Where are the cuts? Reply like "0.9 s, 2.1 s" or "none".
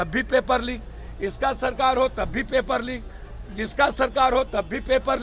none